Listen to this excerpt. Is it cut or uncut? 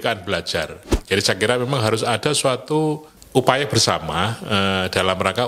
cut